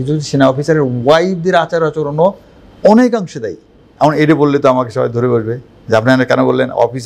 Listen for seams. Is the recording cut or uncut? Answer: uncut